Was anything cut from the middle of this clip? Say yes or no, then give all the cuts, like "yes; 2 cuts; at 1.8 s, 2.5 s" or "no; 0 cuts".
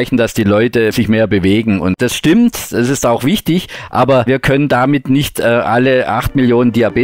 yes; 3 cuts; at 0.9 s, 2.0 s, 4.2 s